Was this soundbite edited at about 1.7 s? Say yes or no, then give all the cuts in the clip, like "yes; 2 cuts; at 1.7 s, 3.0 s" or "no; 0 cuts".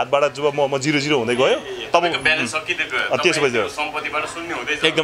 no; 0 cuts